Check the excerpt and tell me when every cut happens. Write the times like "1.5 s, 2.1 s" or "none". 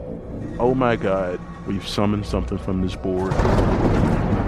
none